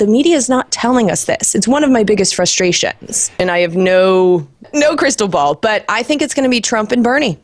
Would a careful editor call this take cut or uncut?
cut